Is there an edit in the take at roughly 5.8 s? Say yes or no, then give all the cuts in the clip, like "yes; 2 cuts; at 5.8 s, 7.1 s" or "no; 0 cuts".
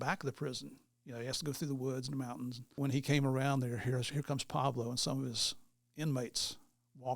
no; 1 cut; at 2.8 s